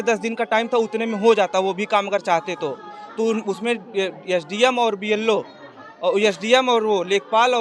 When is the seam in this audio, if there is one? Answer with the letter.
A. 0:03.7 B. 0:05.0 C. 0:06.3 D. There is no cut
D